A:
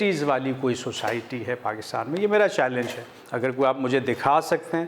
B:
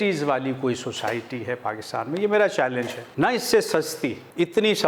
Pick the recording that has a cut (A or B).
B